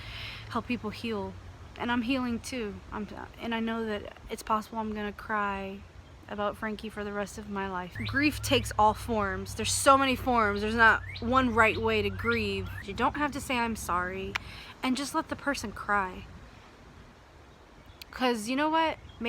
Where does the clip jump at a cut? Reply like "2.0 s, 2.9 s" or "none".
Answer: 7.9 s, 12.8 s